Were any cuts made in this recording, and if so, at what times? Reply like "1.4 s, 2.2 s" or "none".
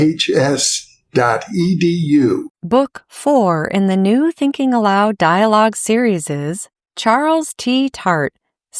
2.5 s